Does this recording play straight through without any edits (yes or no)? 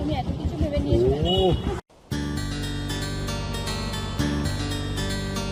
yes